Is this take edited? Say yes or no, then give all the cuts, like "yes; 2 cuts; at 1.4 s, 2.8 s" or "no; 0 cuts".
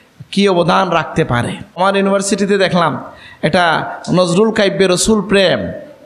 yes; 1 cut; at 1.8 s